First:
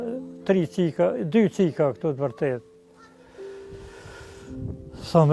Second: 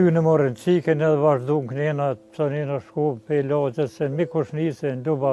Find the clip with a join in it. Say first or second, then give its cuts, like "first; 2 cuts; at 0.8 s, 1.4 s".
first; 2 cuts; at 2.9 s, 4.2 s